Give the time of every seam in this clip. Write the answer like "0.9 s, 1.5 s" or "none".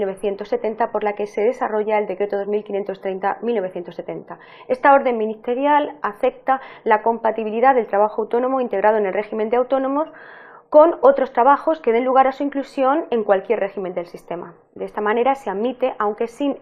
none